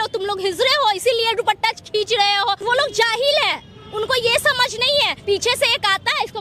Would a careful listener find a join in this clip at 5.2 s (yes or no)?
yes